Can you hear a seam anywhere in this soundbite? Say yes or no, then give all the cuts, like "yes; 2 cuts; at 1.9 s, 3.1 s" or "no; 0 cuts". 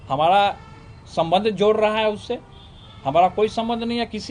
no; 0 cuts